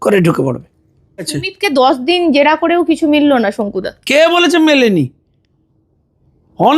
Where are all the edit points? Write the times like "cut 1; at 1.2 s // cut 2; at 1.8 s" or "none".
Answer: cut 1; at 1.4 s